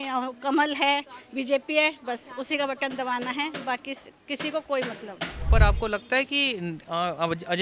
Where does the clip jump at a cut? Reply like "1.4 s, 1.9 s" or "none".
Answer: 5.5 s